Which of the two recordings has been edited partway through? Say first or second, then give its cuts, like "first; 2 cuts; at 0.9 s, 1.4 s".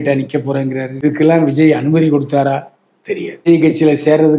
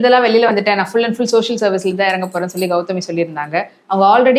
first; 2 cuts; at 0.9 s, 3.5 s